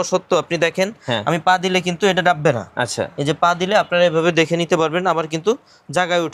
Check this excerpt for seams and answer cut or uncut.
uncut